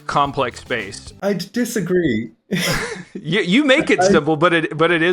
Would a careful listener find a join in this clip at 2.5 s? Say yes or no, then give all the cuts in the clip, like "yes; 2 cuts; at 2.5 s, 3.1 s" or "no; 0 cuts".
no; 1 cut; at 1.2 s